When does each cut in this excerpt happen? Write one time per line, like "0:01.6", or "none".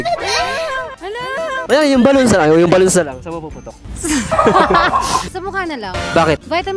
none